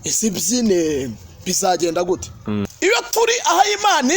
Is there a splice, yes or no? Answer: yes